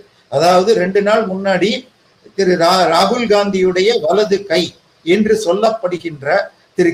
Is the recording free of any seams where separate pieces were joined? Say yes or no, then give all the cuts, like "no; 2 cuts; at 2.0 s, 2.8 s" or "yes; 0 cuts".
yes; 0 cuts